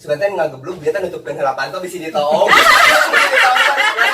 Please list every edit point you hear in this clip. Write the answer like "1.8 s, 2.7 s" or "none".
none